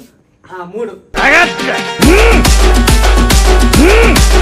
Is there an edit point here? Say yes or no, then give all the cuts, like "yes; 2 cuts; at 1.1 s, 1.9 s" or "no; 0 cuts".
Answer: yes; 1 cut; at 1.0 s